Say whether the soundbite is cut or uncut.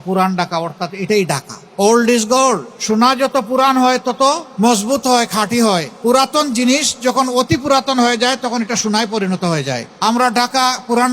cut